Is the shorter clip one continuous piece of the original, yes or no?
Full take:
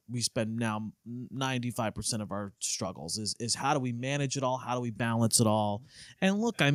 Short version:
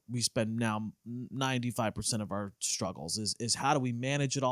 yes